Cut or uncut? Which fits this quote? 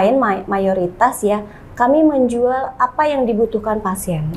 uncut